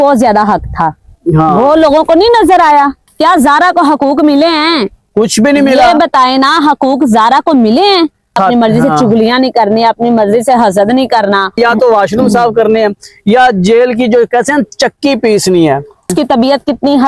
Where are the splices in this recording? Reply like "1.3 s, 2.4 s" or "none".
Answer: 3.1 s, 8.4 s, 11.6 s, 16.1 s

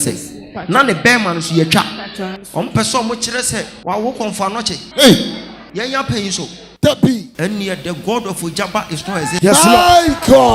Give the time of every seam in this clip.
2.4 s, 3.7 s, 4.8 s, 5.6 s, 7.3 s

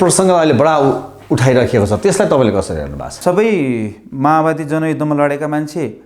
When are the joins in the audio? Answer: 3.2 s

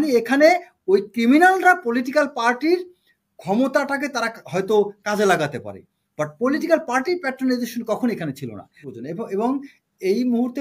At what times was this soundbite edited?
8.8 s

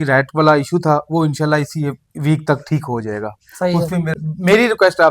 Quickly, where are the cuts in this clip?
4.1 s

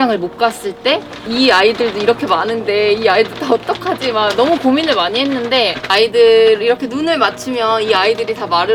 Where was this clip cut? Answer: none

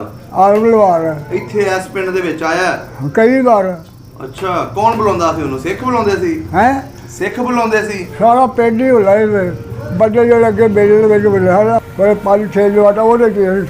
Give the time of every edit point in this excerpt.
11.9 s

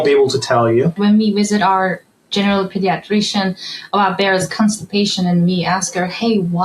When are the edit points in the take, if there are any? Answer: 1.0 s

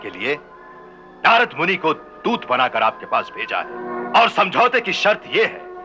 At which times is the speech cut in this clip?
3.8 s

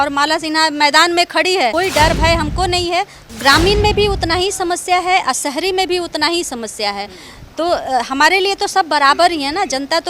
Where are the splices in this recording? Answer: 1.7 s, 3.2 s

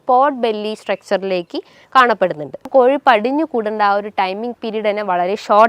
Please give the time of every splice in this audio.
2.7 s

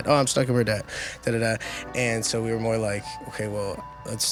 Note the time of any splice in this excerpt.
none

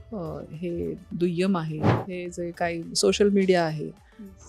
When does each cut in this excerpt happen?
2.0 s

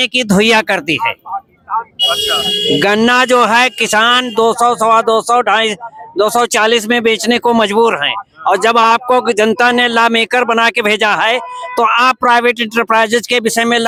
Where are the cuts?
none

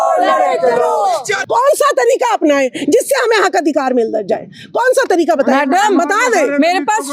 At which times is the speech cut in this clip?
1.3 s

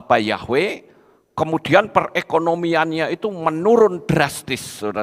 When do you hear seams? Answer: none

